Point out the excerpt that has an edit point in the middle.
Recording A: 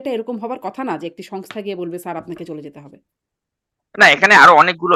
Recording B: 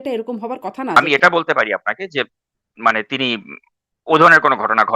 B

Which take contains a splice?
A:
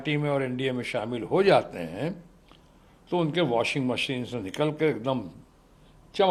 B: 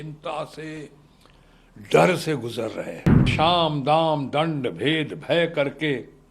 B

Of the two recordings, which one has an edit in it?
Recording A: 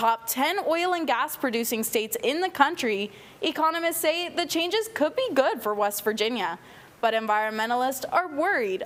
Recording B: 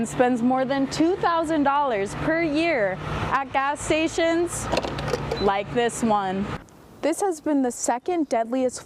B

